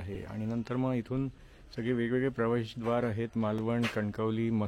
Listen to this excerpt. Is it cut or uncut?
uncut